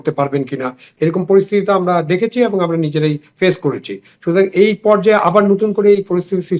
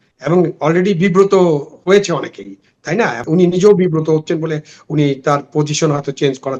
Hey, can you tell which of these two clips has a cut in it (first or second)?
second